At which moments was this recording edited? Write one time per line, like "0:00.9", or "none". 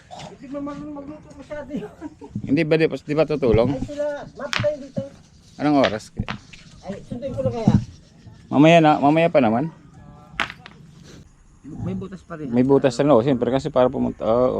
0:11.2